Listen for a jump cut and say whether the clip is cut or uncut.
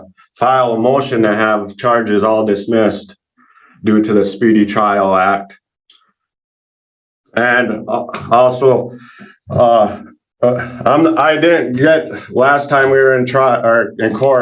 uncut